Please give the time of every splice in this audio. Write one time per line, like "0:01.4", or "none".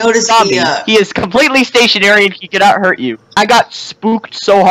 0:03.4